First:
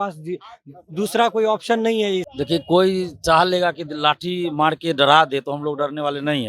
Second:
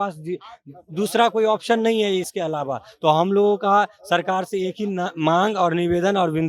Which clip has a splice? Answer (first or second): first